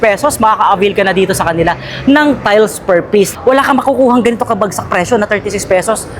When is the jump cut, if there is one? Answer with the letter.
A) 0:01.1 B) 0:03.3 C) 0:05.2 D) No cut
B